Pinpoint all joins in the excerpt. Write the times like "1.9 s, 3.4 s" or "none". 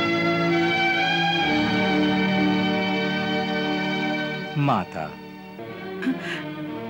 5.6 s